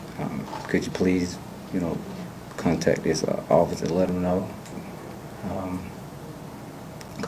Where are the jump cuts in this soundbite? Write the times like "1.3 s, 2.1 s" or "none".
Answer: 4.9 s